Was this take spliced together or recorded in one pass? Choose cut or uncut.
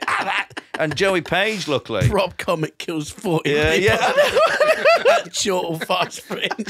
uncut